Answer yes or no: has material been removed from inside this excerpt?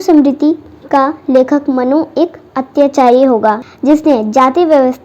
yes